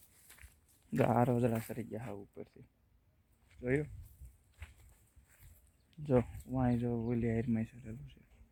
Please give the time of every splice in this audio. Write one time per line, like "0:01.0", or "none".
none